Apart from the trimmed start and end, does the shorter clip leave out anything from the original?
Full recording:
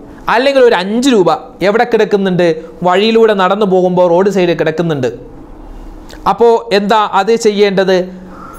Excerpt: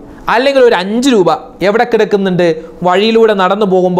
no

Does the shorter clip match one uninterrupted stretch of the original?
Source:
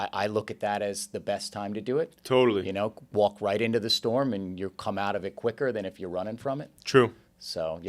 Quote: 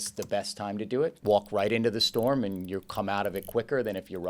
no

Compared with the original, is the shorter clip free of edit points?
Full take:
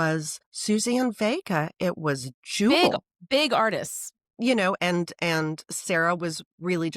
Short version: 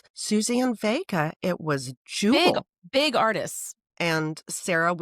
no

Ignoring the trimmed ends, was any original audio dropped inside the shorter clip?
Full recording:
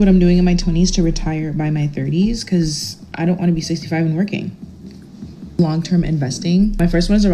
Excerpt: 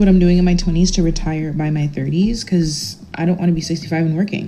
no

